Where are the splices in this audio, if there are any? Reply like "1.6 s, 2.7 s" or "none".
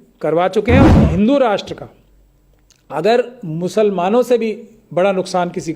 1.0 s